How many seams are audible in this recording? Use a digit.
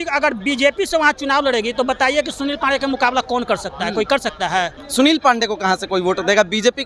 1